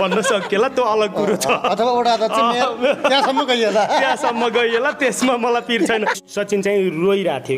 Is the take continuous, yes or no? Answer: no